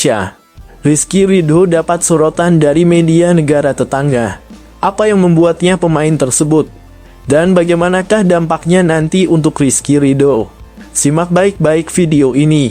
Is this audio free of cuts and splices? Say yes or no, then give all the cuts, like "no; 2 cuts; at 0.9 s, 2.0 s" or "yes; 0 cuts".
yes; 0 cuts